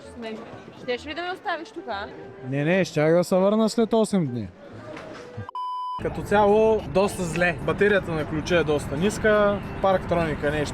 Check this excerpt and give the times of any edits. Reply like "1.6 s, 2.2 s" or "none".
6.0 s, 6.9 s